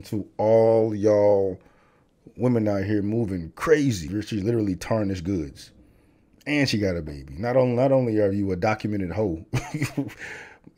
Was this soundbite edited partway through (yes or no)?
yes